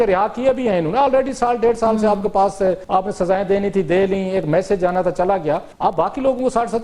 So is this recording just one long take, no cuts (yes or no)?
no